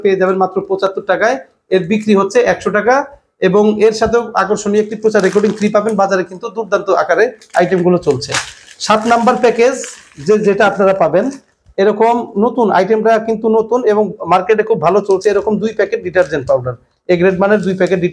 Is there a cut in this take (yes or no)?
no